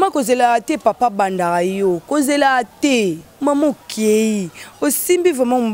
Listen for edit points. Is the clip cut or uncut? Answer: cut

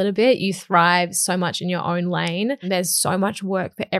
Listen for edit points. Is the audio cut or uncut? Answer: cut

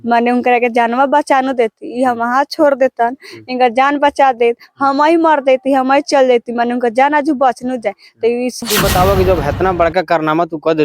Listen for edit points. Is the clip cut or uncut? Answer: cut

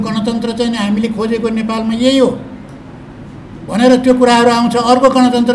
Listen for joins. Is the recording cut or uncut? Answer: uncut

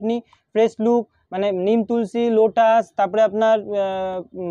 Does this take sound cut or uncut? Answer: uncut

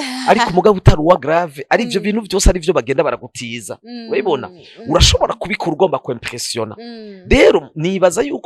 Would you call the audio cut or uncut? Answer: uncut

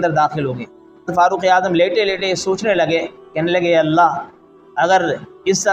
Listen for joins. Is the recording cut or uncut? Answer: cut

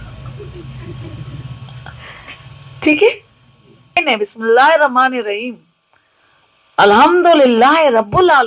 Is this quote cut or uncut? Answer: cut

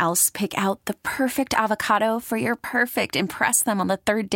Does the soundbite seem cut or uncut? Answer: uncut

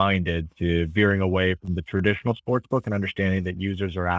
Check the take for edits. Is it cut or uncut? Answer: uncut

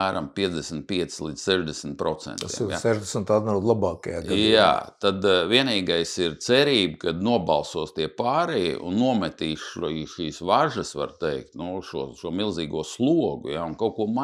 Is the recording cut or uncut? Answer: uncut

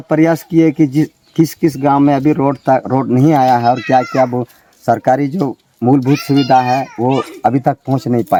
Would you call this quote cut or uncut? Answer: uncut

